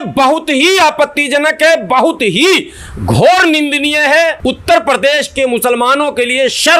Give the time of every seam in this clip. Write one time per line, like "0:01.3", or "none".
0:04.4